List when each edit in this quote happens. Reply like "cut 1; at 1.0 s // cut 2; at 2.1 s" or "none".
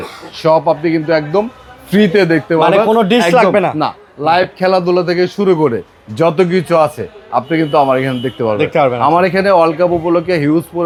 none